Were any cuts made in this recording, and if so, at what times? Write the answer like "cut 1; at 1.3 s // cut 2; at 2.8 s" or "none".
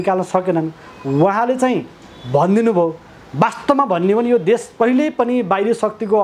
none